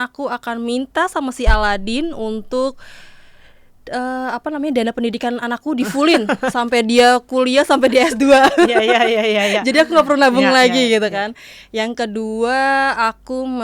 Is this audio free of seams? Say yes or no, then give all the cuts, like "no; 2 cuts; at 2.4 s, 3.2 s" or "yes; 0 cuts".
yes; 0 cuts